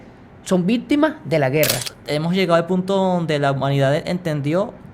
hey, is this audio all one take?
no; 1 cut; at 1.9 s

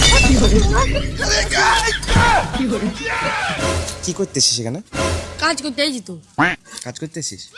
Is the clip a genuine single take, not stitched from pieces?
no; 1 cut; at 3.7 s

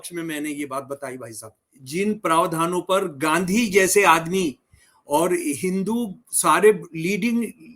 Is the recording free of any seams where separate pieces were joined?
no; 1 cut; at 1.7 s

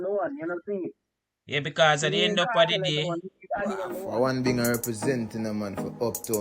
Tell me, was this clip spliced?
yes; 1 cut; at 4.0 s

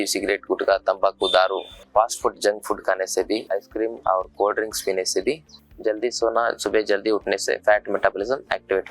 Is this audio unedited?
no; 2 cuts; at 1.8 s, 5.7 s

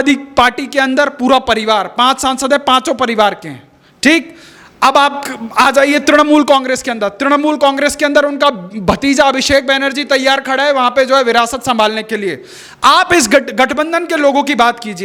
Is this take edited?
no; 0 cuts

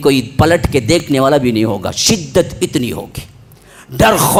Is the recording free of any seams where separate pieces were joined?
yes; 0 cuts

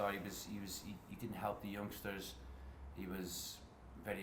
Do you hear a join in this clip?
no; 0 cuts

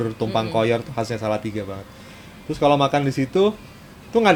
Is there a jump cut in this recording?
no; 0 cuts

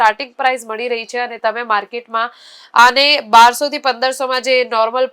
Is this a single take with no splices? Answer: yes; 0 cuts

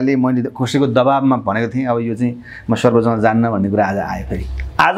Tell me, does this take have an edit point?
no; 0 cuts

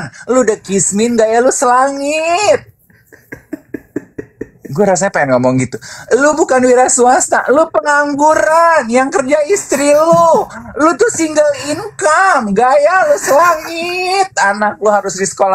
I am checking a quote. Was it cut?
no; 0 cuts

